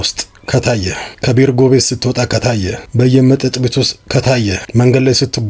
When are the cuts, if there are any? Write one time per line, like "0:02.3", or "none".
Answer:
0:01.1
0:02.5
0:04.6